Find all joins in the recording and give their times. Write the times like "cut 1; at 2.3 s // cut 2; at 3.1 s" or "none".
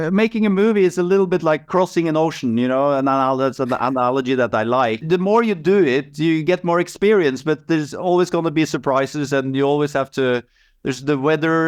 none